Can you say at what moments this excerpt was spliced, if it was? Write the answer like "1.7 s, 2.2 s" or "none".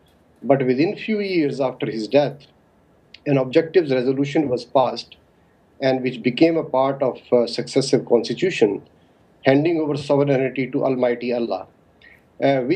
none